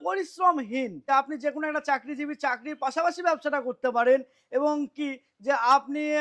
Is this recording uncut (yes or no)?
no